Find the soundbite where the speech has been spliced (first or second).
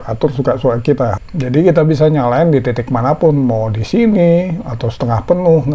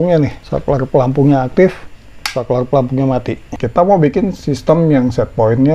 second